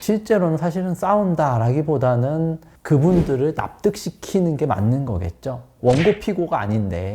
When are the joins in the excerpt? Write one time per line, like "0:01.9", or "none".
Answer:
0:05.7